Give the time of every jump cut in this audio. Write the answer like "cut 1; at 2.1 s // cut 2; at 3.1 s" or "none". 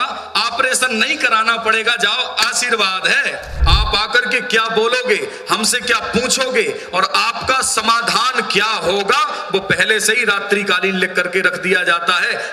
cut 1; at 3.5 s